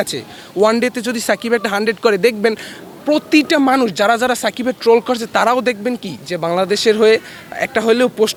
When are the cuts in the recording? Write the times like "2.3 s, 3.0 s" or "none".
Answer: none